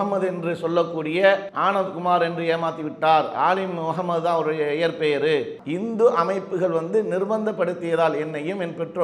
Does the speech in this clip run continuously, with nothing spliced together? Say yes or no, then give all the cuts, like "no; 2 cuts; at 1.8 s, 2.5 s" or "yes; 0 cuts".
no; 2 cuts; at 1.5 s, 5.5 s